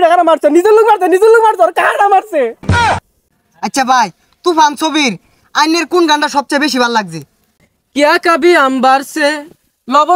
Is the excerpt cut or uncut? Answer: cut